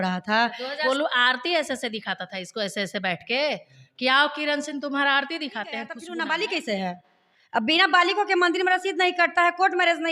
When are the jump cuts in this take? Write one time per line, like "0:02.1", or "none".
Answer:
0:00.8
0:06.0